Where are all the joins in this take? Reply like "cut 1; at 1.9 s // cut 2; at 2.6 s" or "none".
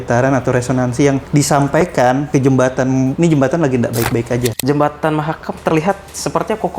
cut 1; at 1.2 s // cut 2; at 2.2 s // cut 3; at 3.1 s // cut 4; at 4.6 s